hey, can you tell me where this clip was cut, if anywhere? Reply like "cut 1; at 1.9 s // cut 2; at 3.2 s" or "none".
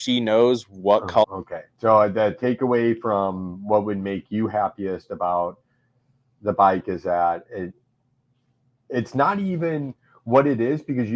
cut 1; at 1.2 s